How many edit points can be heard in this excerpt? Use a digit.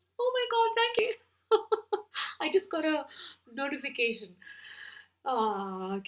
1